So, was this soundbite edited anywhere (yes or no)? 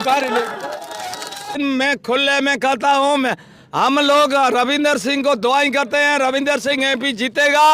yes